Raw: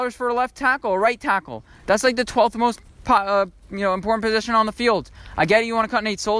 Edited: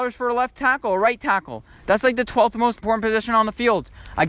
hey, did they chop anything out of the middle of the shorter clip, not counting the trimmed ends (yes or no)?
yes